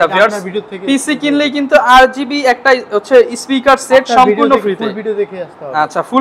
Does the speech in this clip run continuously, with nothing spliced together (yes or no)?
yes